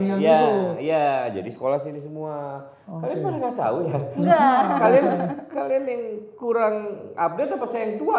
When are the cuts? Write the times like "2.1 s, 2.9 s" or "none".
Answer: none